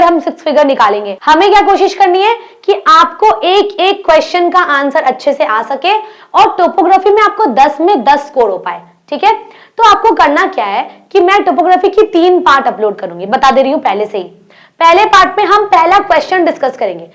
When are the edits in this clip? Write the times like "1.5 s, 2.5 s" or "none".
1.1 s